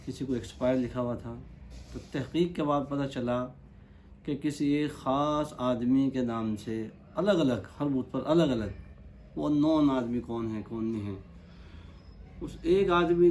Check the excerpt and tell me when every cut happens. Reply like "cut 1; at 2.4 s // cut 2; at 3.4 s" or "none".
none